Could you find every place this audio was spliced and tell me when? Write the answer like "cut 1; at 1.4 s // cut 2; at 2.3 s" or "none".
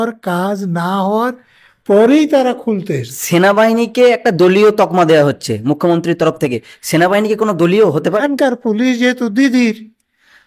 cut 1; at 3.1 s // cut 2; at 8.2 s